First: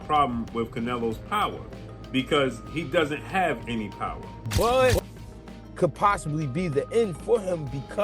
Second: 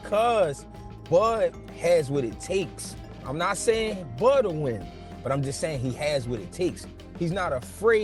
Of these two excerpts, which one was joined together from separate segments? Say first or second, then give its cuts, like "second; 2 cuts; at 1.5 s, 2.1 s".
first; 1 cut; at 4.4 s